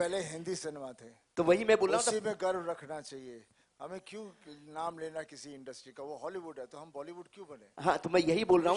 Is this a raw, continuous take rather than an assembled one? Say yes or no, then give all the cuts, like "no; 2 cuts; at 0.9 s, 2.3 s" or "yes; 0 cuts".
yes; 0 cuts